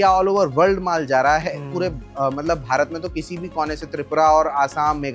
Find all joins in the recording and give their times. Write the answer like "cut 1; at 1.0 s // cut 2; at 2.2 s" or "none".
none